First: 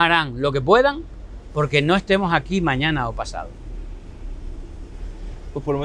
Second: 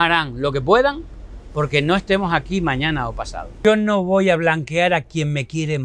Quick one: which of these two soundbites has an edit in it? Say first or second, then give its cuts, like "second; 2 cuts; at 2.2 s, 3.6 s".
second; 1 cut; at 3.5 s